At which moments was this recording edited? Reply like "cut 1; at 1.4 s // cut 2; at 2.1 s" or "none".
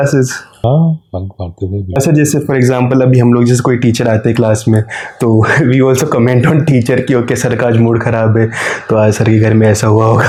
none